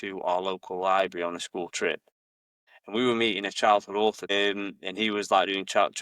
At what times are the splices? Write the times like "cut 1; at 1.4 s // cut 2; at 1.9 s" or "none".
cut 1; at 4.2 s